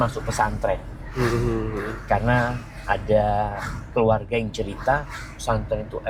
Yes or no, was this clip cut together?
no